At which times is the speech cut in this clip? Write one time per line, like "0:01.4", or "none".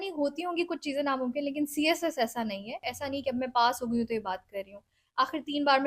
0:02.9